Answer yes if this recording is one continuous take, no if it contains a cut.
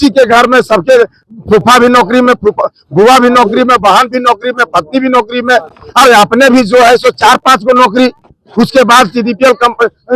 yes